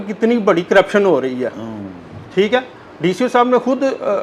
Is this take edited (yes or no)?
no